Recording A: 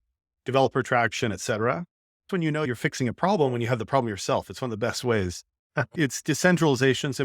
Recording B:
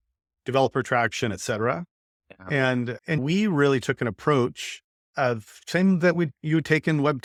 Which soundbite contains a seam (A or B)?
A